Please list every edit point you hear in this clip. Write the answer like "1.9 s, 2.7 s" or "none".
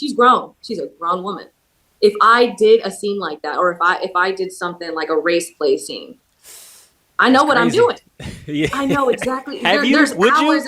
none